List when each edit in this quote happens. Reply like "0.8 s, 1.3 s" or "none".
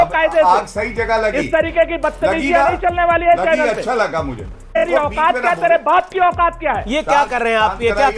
4.8 s